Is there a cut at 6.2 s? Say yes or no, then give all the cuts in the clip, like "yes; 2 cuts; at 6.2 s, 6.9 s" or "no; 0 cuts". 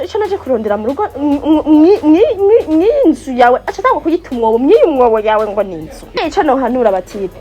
yes; 1 cut; at 6.2 s